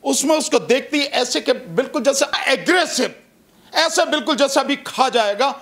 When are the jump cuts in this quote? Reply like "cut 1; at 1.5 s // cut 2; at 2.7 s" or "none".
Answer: cut 1; at 2.3 s